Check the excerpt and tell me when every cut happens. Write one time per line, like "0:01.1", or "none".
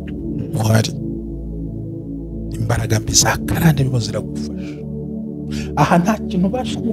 0:03.9
0:05.6